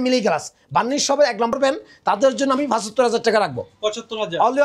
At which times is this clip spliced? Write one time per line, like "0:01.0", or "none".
0:01.5